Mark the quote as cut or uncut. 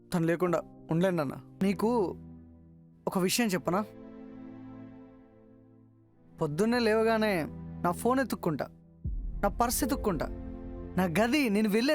cut